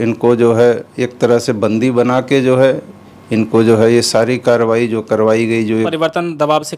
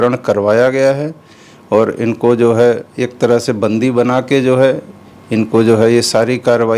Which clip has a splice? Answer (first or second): first